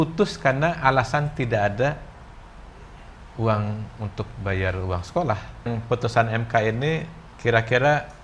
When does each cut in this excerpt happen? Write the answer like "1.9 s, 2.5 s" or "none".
5.7 s